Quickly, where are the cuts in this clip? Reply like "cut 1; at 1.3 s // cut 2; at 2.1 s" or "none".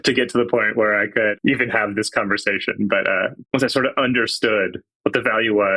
cut 1; at 1.3 s // cut 2; at 3.4 s // cut 3; at 4.8 s